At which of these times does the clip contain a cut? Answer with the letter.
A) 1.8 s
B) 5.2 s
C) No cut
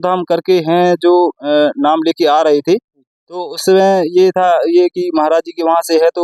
C